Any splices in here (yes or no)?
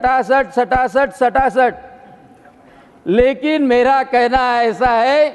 no